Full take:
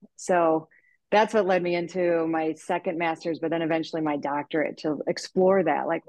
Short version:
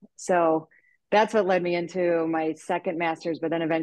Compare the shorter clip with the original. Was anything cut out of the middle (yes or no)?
no